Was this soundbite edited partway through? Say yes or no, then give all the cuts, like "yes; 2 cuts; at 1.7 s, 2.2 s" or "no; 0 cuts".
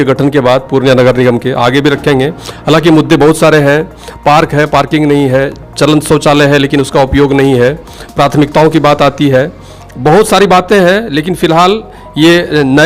no; 0 cuts